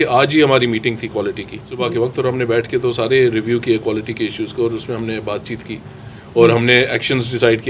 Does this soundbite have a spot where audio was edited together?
yes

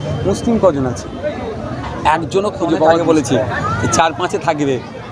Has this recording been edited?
yes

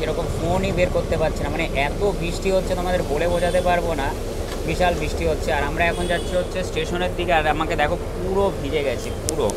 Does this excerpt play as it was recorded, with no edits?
yes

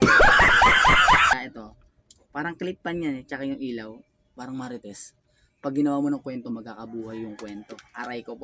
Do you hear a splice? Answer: yes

